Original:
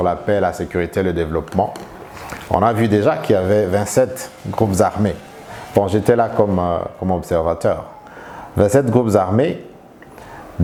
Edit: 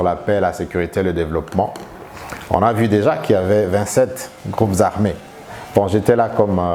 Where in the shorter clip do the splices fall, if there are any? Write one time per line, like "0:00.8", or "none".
none